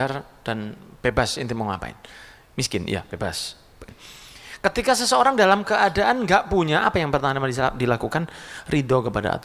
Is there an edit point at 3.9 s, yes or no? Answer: yes